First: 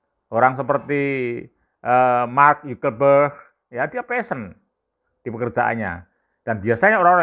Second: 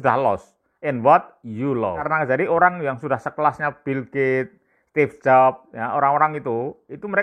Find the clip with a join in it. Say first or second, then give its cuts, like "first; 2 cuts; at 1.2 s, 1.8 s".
second; 1 cut; at 2.1 s